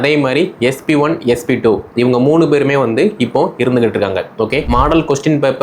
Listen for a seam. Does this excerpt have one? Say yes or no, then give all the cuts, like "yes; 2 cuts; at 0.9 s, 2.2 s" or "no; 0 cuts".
yes; 1 cut; at 4.6 s